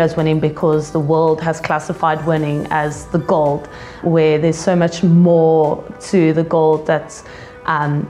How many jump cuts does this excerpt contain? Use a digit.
0